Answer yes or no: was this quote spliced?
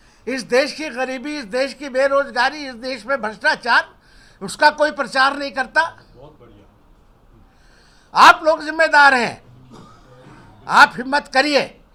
no